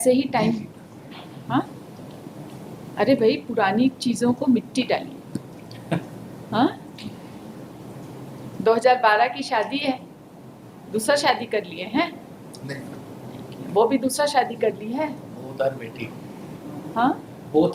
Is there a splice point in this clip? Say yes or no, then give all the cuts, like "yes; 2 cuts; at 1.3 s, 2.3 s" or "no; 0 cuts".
no; 0 cuts